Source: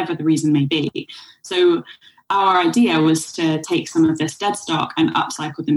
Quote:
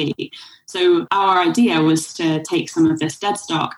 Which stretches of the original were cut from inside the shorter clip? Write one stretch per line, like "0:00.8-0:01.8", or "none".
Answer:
0:01.8-0:02.3